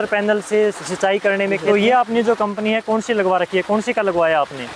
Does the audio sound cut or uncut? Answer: cut